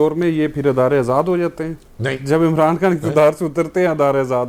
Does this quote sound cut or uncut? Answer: uncut